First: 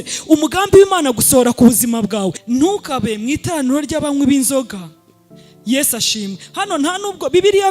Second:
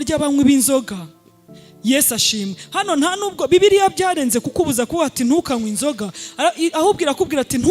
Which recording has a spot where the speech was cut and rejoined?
first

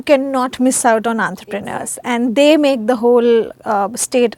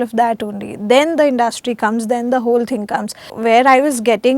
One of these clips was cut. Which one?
second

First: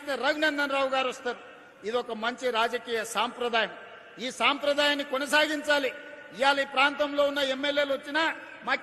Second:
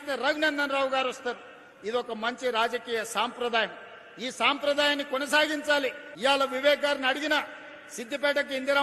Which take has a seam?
second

